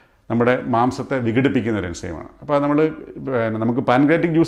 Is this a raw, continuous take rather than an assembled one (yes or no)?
yes